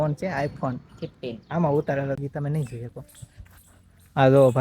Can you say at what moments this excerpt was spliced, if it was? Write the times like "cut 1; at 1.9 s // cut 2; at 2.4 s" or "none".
cut 1; at 2.2 s